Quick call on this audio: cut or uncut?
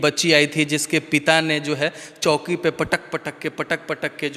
uncut